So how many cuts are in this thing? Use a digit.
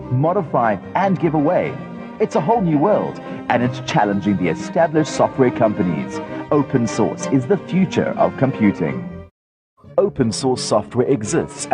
1